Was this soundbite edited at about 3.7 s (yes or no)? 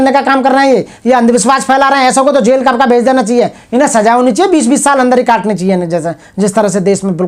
no